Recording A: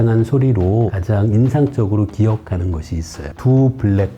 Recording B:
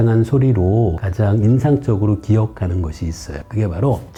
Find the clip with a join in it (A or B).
A